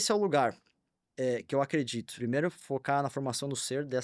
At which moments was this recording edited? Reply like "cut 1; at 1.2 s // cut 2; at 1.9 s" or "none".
cut 1; at 2.1 s